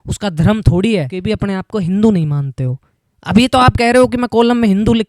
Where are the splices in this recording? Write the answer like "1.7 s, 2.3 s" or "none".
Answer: 1.2 s